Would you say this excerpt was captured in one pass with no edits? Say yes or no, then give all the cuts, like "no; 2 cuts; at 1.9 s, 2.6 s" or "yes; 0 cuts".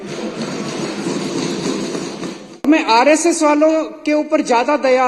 no; 1 cut; at 2.6 s